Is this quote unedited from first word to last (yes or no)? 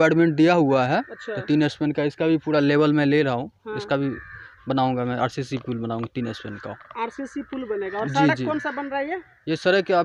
yes